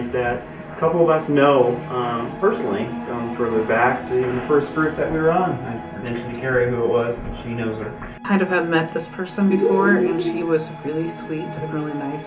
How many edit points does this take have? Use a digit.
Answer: 1